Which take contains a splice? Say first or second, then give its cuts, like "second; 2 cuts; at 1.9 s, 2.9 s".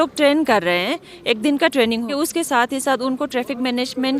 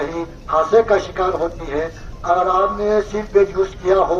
first; 1 cut; at 2.1 s